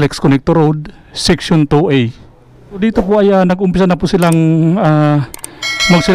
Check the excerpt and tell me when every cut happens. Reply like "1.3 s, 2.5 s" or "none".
2.8 s